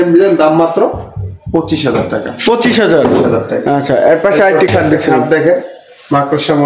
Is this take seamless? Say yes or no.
yes